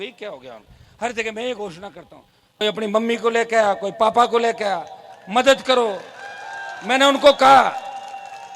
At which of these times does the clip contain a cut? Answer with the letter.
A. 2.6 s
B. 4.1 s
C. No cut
A